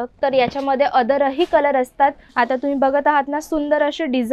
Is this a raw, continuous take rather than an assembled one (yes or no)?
no